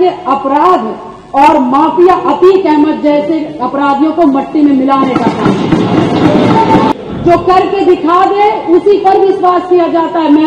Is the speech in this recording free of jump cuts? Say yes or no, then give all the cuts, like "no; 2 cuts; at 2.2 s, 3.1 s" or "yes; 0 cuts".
no; 1 cut; at 6.9 s